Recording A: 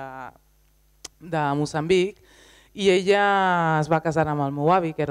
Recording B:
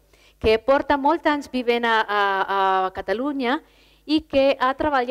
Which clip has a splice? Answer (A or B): A